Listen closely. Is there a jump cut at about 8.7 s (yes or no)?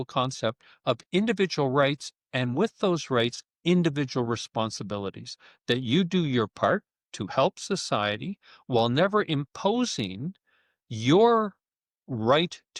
no